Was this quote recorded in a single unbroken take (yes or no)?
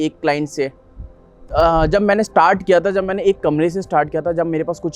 no